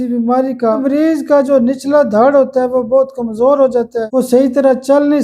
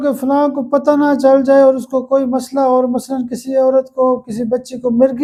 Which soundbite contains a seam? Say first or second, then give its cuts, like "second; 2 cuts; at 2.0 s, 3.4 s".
first; 2 cuts; at 0.8 s, 4.1 s